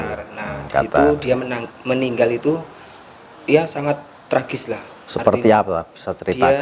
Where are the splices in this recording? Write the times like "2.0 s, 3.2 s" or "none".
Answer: none